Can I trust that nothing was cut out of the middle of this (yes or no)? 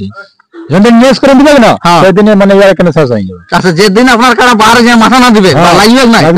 yes